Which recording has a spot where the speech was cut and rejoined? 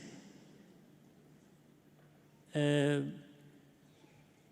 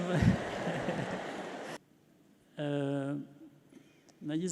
second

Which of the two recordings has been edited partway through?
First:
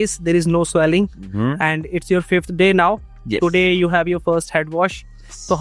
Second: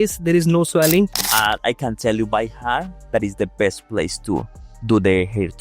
second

